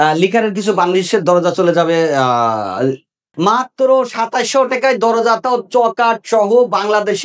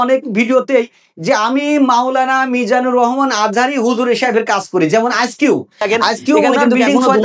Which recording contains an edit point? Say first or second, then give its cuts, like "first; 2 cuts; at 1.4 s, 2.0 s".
first; 1 cut; at 3.2 s